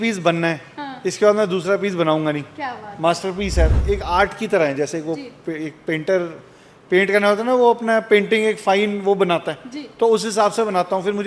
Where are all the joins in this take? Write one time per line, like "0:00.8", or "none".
0:03.7